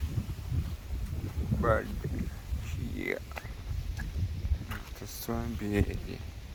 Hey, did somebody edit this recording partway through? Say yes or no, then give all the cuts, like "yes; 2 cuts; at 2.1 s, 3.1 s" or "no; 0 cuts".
no; 0 cuts